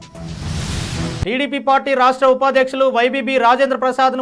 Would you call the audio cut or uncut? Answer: cut